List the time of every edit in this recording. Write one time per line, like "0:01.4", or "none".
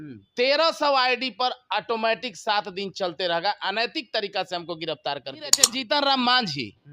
0:05.7